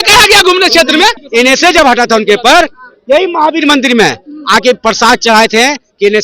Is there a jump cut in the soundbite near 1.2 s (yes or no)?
yes